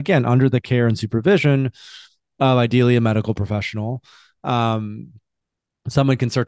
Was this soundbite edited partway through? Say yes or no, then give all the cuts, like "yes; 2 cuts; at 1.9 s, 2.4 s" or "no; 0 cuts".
no; 0 cuts